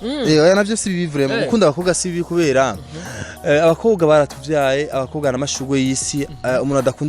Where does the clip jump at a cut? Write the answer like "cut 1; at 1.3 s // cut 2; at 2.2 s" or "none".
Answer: none